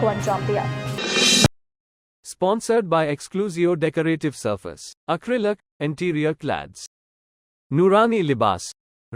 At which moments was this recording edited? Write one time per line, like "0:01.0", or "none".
none